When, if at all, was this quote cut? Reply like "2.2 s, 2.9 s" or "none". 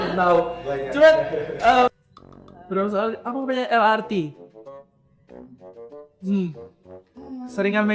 1.9 s